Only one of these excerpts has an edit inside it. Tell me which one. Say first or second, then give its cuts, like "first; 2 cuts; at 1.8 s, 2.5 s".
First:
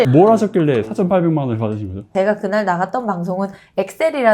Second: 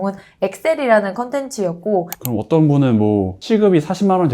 second; 1 cut; at 2.2 s